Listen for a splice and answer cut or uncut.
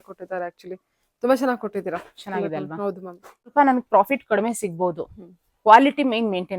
cut